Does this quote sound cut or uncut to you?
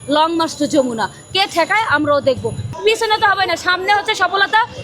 cut